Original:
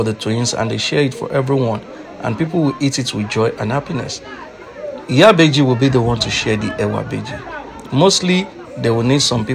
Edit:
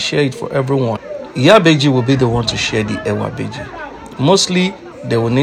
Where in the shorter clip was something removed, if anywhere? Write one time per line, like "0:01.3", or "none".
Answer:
0:01.1